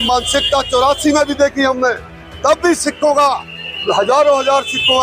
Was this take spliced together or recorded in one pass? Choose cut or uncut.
uncut